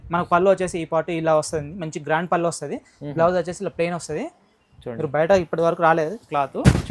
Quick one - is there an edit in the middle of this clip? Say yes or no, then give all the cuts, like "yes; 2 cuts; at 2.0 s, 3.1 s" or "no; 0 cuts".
no; 0 cuts